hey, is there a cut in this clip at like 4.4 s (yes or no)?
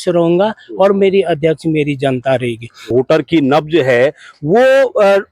no